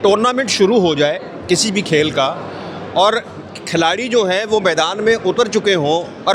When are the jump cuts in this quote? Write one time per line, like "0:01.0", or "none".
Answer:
none

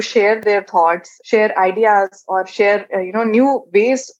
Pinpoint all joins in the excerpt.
none

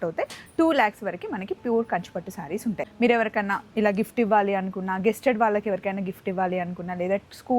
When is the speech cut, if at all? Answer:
0:02.9

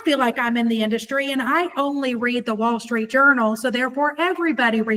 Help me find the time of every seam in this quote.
none

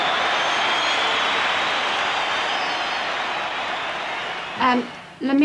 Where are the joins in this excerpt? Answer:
0:03.4

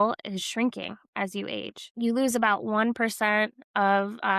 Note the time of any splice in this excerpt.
0:01.9

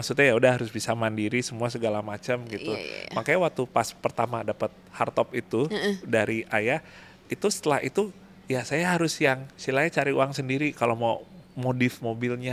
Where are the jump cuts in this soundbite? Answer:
none

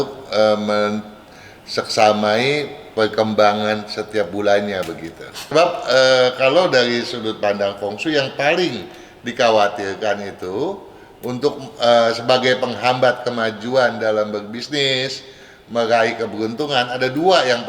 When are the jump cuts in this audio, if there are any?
0:05.3

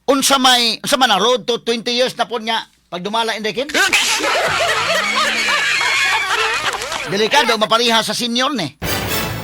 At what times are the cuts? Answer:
none

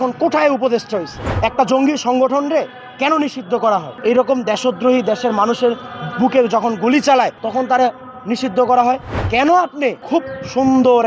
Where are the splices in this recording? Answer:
0:01.3
0:03.9
0:07.4
0:09.1
0:10.0

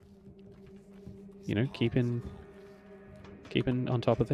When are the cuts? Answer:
none

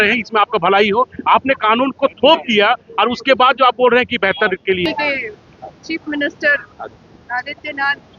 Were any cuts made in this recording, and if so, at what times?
0:04.9

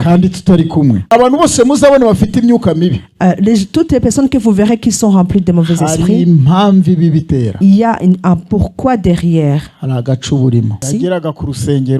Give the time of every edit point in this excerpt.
0:01.0
0:10.8

